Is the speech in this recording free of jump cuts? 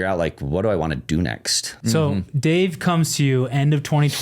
no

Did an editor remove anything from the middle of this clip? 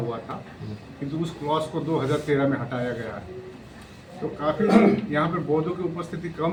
no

